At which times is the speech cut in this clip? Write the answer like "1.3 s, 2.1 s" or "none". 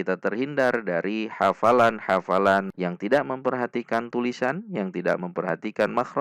2.7 s

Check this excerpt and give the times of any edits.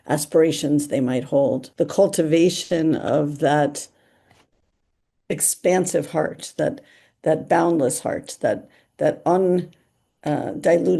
1.6 s

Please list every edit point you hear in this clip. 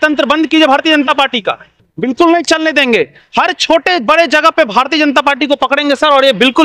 none

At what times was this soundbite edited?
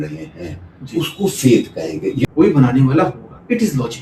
2.2 s

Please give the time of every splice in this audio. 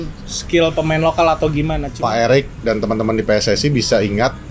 1.9 s

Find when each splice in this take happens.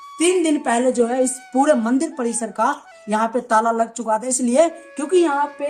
none

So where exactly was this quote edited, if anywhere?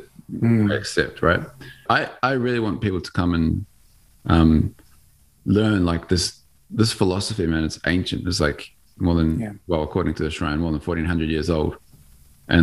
1.7 s

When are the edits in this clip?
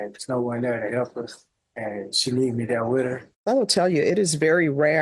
3.3 s

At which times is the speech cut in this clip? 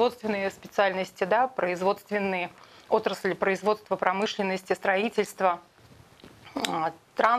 none

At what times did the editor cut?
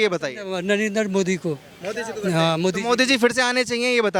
none

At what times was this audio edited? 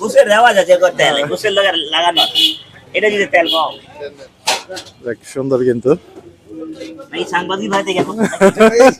none

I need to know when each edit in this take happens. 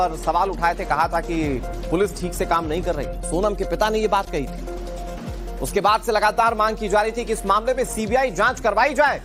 none

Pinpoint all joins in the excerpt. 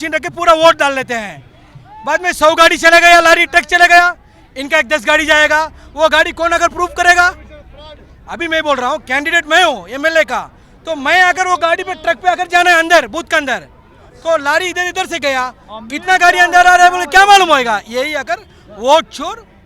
none

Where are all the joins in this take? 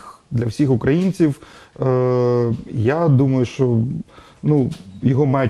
none

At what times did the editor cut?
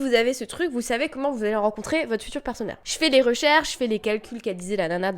2.8 s

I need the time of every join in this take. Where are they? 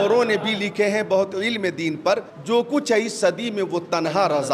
2.3 s

